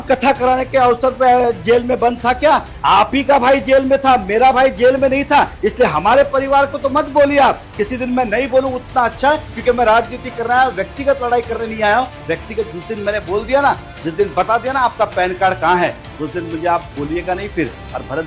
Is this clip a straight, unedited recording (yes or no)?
yes